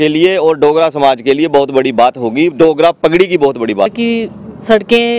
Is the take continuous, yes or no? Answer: no